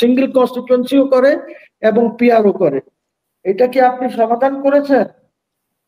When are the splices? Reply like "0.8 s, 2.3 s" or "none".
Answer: none